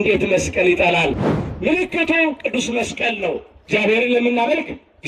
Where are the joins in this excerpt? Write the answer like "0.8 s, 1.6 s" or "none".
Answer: 1.3 s